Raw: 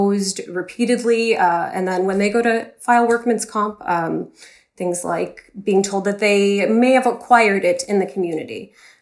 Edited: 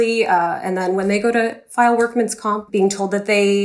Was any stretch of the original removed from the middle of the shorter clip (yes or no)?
yes